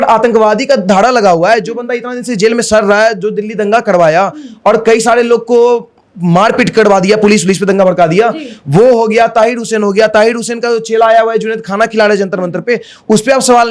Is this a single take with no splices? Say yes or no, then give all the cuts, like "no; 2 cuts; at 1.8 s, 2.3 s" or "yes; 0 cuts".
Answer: yes; 0 cuts